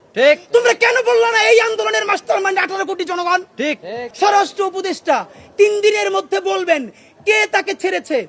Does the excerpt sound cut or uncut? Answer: cut